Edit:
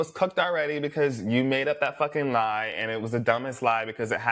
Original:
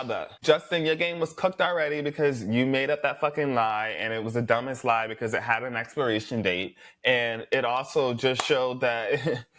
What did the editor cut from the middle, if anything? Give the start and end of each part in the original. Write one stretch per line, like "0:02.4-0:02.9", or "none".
none